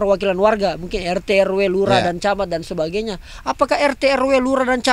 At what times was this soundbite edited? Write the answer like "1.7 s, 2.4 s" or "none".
none